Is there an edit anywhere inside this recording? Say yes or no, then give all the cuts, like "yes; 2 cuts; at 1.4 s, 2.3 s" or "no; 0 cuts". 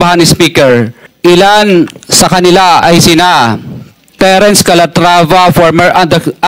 yes; 1 cut; at 1.0 s